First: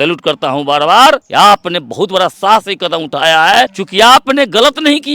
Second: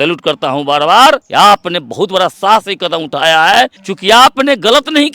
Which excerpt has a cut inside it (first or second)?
first